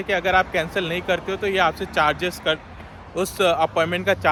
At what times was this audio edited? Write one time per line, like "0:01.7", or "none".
none